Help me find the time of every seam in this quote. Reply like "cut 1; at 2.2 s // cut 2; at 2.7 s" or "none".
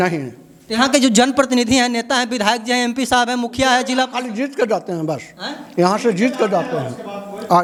none

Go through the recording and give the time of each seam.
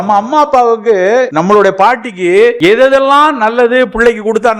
cut 1; at 1.3 s // cut 2; at 2.6 s

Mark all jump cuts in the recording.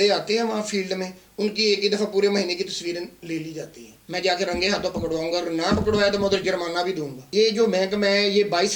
cut 1; at 3.9 s // cut 2; at 7.3 s

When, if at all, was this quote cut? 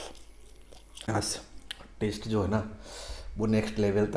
cut 1; at 1.1 s

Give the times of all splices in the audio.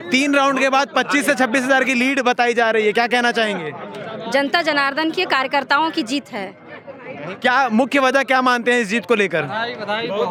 none

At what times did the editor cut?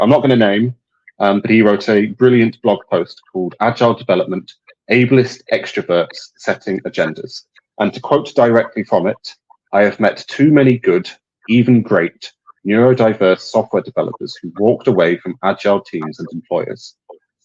none

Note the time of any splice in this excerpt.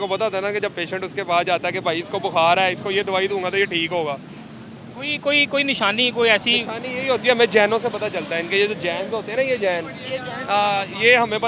none

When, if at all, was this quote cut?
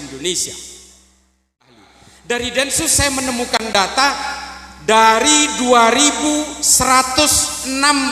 cut 1; at 1.8 s

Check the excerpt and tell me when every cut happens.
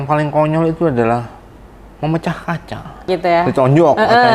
cut 1; at 3.1 s

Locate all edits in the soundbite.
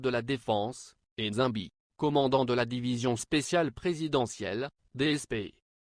cut 1; at 4.6 s

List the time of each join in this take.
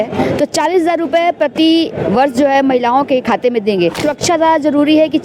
cut 1; at 4.0 s

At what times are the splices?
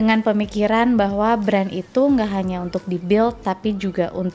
none

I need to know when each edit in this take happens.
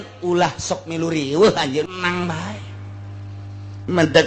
cut 1; at 1.9 s

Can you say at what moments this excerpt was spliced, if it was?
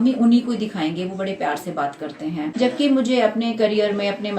cut 1; at 2.5 s

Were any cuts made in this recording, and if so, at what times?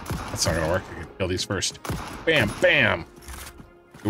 none

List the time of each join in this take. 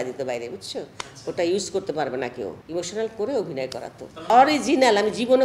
cut 1; at 2.6 s // cut 2; at 4.3 s

